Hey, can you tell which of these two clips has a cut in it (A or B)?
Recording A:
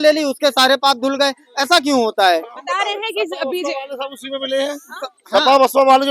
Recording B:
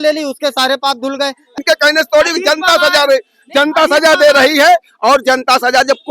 B